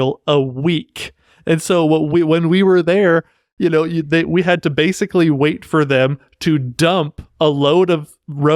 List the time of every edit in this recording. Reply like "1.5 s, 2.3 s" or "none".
none